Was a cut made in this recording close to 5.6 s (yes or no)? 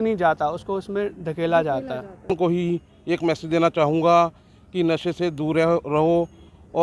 no